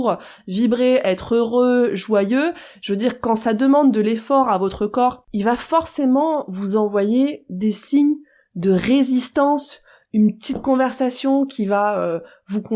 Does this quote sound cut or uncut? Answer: cut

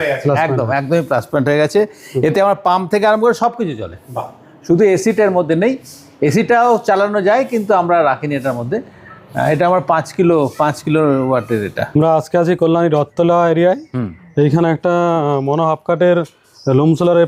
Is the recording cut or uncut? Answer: uncut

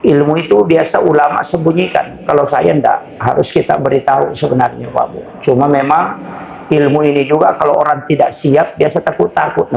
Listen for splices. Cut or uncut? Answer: uncut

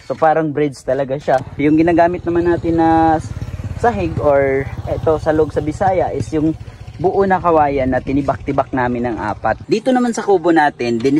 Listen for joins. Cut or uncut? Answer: cut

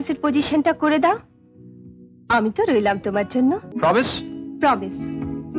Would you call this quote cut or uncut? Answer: cut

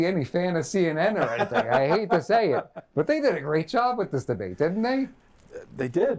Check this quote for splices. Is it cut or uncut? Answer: uncut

